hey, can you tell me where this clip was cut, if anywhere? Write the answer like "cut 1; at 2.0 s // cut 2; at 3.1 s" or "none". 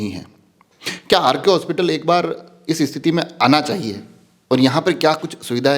none